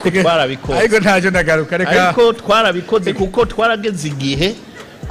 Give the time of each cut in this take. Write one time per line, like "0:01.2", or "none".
none

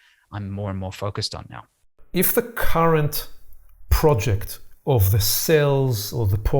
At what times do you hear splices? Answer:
0:01.9

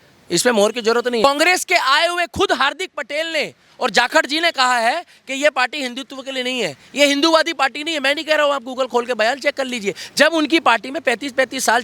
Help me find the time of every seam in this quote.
0:01.2

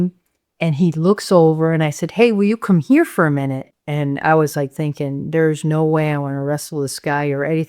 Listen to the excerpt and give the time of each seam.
0:03.6

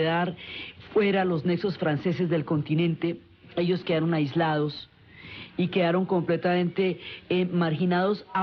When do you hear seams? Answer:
none

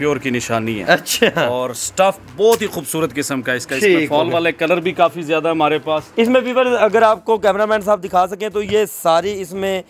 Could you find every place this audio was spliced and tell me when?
none

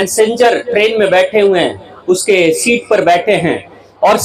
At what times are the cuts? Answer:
none

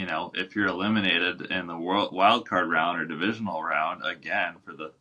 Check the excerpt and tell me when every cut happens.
none

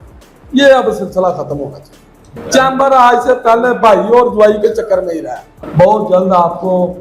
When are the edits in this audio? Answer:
0:02.3
0:05.5

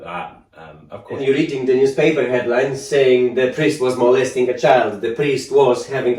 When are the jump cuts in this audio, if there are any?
0:01.2

